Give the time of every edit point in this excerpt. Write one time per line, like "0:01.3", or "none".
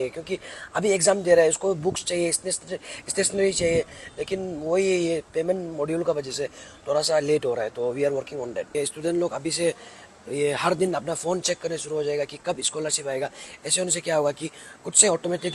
0:08.7